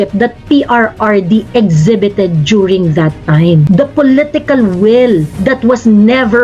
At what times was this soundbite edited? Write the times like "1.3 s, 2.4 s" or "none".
3.6 s, 5.3 s